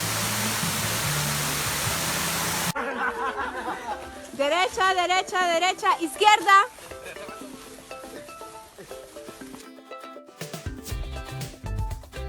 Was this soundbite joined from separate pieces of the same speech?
no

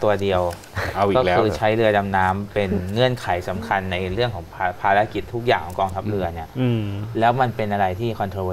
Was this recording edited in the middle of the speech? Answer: no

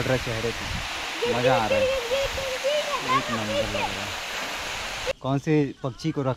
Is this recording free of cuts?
no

